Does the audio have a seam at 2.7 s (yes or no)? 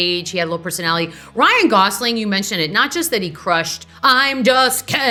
no